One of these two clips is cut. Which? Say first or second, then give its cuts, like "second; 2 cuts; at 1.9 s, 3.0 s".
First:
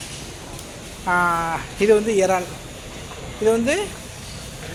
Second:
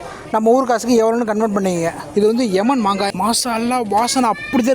second; 2 cuts; at 2.0 s, 3.1 s